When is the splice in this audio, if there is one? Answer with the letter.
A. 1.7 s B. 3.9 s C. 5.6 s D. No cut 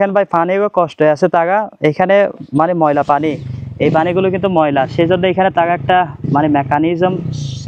D